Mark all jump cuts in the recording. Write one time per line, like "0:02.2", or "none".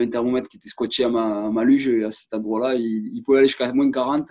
none